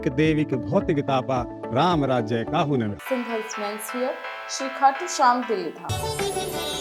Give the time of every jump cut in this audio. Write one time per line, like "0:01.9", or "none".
0:05.9